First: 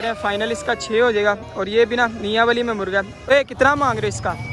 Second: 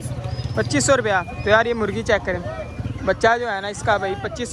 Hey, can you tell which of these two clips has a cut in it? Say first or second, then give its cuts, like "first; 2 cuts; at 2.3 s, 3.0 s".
first; 1 cut; at 3.3 s